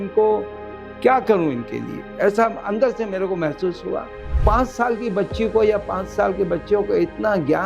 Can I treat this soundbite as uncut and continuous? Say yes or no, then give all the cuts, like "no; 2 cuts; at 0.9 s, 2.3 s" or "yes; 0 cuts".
no; 1 cut; at 4.3 s